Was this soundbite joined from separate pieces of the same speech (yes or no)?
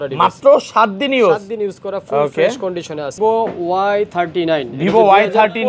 yes